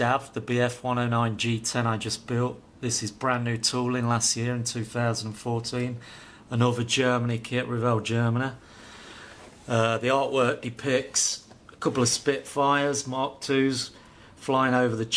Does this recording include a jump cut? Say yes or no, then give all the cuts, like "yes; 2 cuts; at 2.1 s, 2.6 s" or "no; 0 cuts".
no; 0 cuts